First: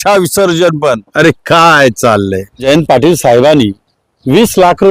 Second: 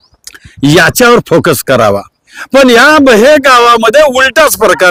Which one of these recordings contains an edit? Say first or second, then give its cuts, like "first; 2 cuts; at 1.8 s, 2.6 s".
first; 2 cuts; at 1.1 s, 2.5 s